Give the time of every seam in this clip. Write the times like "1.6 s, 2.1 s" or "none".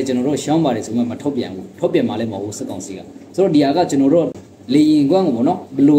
4.3 s